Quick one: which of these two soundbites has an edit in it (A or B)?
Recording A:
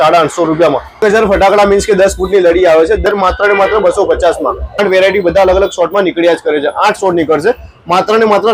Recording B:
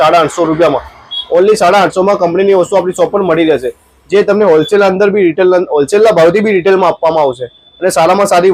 A